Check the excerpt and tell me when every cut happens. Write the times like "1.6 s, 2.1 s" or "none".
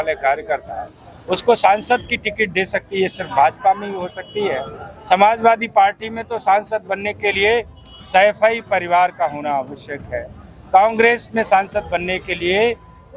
none